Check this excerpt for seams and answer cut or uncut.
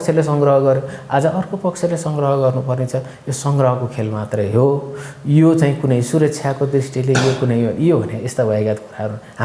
uncut